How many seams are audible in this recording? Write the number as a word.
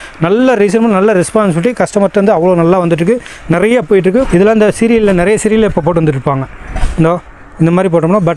one